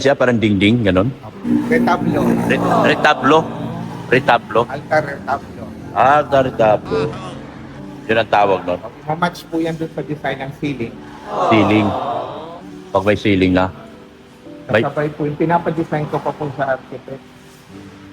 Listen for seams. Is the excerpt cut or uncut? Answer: cut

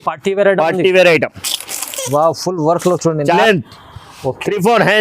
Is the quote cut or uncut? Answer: cut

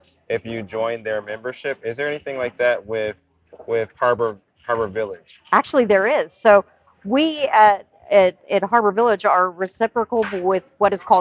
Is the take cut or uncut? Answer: uncut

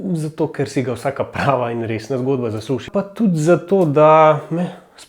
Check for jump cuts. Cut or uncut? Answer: cut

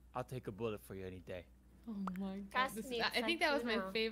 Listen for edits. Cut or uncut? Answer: uncut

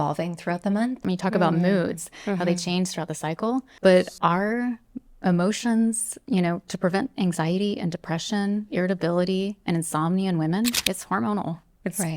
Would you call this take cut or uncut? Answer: cut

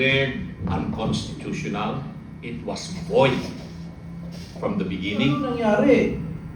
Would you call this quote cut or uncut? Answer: cut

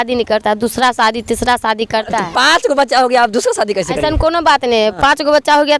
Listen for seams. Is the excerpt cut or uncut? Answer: uncut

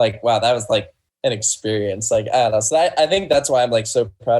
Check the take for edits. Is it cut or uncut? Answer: cut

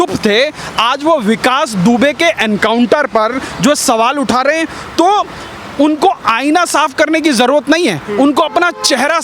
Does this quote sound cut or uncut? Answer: uncut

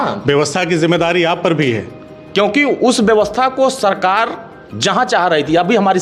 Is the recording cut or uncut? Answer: uncut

